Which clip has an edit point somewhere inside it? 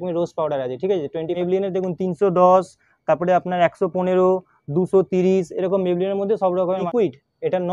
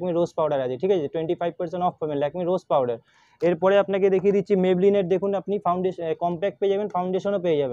first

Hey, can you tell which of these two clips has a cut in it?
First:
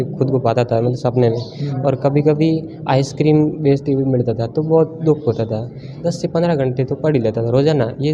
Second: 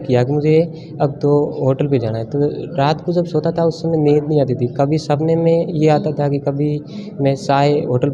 first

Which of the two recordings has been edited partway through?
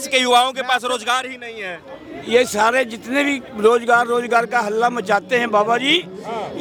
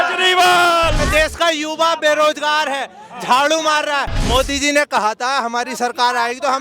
second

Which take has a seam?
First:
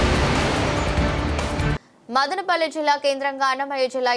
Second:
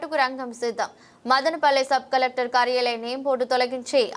first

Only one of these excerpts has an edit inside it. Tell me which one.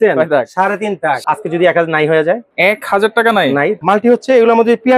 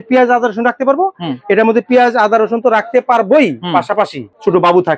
first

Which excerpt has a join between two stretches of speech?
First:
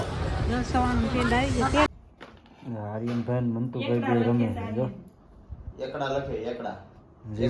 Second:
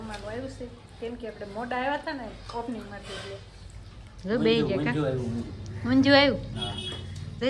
first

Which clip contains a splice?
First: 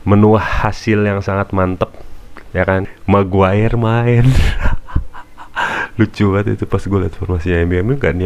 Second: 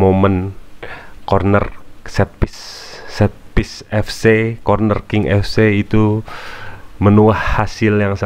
first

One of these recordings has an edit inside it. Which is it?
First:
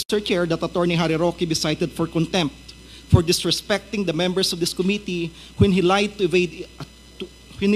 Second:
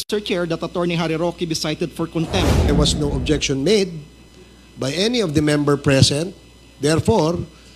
second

